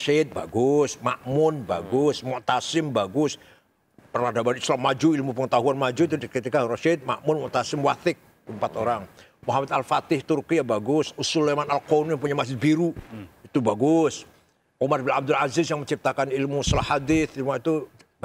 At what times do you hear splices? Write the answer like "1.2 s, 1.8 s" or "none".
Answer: none